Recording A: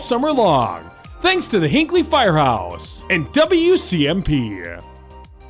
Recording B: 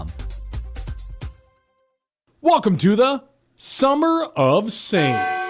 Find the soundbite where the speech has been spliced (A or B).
B